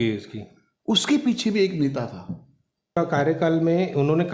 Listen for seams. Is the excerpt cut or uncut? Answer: cut